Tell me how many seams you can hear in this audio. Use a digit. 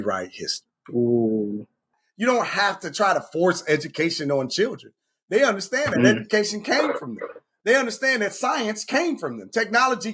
1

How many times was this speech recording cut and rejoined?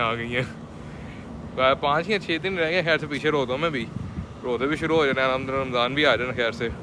0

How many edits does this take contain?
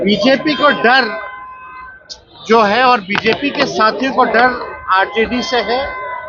0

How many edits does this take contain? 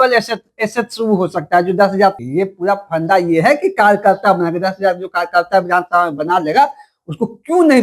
1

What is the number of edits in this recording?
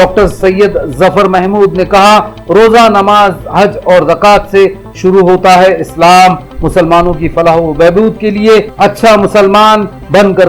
0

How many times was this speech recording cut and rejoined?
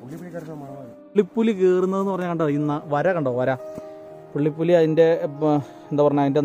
1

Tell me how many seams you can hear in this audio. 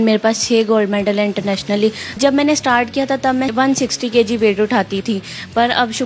3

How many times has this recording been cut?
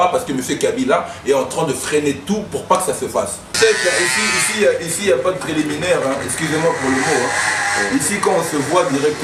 1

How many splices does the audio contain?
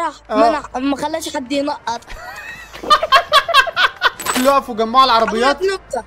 1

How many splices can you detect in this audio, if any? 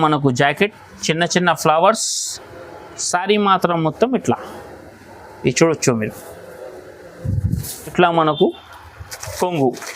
1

